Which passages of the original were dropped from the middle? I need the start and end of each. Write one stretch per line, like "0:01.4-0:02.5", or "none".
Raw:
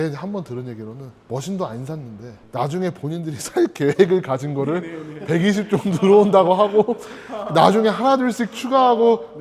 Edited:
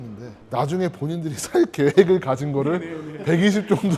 none